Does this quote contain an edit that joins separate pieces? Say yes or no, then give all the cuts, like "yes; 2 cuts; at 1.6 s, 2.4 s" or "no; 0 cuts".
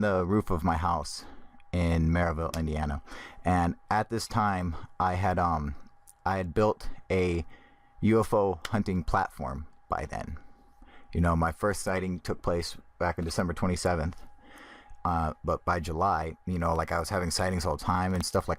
yes; 1 cut; at 10.4 s